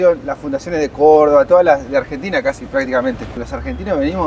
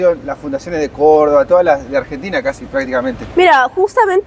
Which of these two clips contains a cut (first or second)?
first